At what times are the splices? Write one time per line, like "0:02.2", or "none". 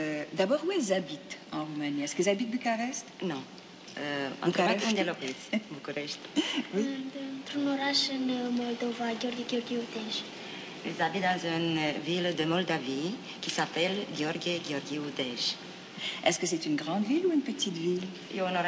none